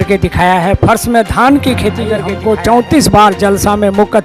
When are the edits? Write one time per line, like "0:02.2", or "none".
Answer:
0:02.3